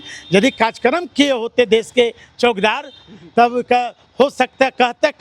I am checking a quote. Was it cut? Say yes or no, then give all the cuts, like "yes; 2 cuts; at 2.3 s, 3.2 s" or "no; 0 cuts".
no; 0 cuts